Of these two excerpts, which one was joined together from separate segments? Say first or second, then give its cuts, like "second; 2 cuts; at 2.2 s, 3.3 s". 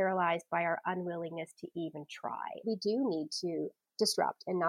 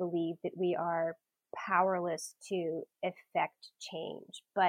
first; 2 cuts; at 2.6 s, 3.8 s